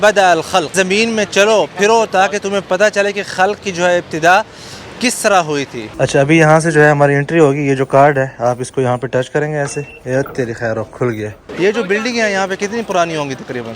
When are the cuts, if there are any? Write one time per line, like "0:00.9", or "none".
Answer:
0:00.7
0:05.8
0:11.4